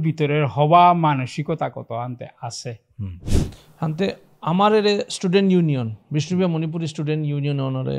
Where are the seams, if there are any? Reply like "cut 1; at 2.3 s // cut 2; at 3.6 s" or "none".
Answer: cut 1; at 3.3 s